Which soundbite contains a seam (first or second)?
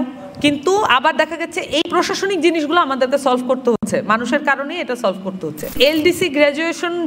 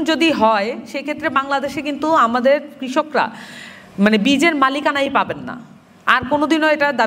first